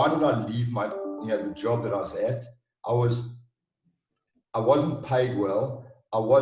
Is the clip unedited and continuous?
yes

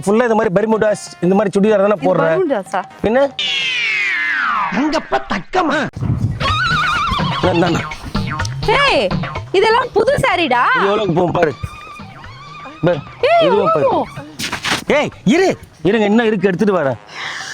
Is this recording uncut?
no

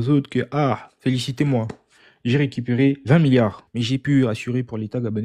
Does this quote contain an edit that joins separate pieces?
yes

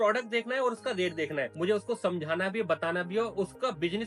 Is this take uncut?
no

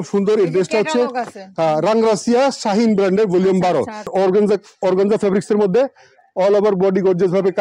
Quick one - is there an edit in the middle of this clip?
yes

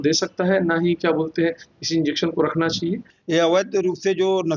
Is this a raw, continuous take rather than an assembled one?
no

